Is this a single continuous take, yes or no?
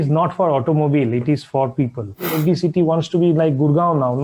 no